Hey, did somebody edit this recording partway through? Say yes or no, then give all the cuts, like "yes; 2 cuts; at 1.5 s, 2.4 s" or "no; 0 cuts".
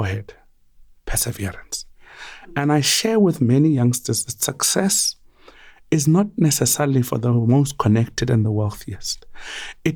no; 0 cuts